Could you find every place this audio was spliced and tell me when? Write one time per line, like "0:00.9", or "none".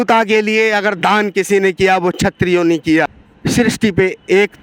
0:03.2